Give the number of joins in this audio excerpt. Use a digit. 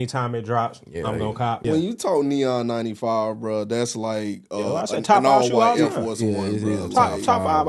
1